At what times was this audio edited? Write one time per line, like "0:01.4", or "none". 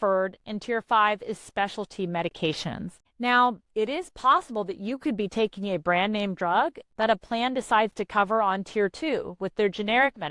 0:03.0